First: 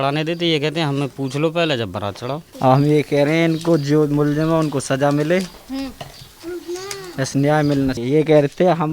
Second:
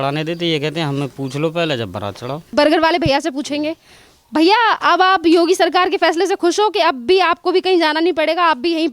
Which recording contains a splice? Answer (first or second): first